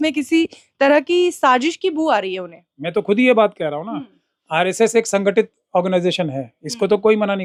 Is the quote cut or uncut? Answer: uncut